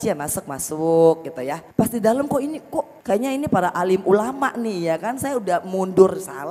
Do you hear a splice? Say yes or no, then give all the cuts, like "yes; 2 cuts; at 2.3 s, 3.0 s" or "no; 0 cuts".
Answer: yes; 2 cuts; at 1.6 s, 3.0 s